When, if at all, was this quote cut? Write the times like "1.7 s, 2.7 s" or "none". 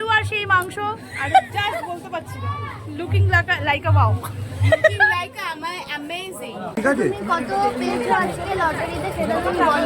6.8 s